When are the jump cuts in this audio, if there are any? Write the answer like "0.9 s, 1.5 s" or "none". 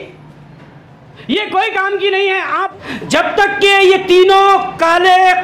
2.6 s

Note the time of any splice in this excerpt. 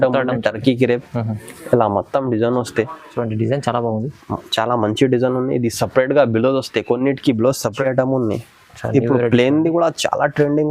7.8 s

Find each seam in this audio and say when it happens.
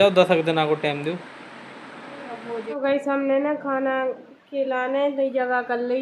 2.7 s

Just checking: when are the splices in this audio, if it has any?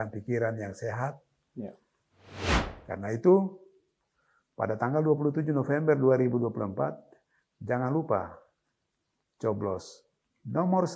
2.3 s

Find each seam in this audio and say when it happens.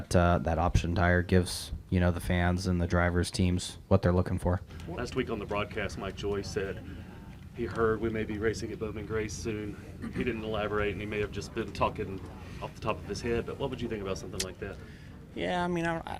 4.8 s

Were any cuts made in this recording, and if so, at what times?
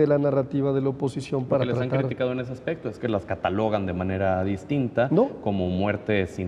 none

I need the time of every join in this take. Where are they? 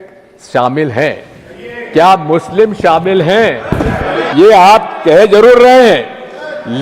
4.2 s

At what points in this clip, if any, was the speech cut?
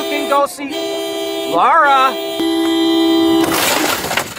2.4 s

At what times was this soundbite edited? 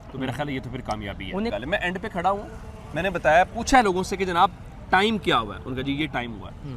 1.5 s

